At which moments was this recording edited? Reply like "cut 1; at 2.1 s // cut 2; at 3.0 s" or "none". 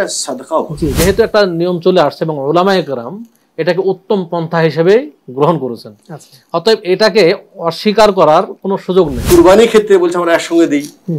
cut 1; at 0.9 s // cut 2; at 9.2 s